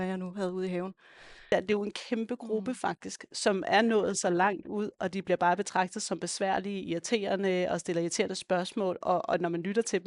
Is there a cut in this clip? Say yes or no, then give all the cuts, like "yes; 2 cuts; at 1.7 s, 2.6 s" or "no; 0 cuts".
yes; 1 cut; at 1.5 s